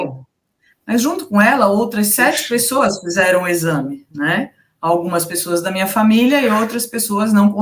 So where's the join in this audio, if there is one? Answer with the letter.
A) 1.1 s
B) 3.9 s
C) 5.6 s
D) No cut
D